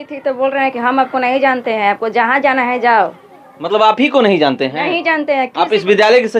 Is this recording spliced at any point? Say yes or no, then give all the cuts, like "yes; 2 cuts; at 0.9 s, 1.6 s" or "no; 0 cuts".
no; 0 cuts